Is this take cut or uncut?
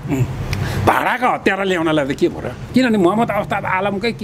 cut